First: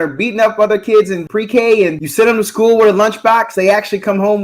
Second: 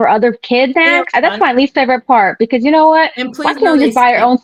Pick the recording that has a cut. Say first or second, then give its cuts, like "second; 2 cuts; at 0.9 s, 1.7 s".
first; 2 cuts; at 1.2 s, 2.0 s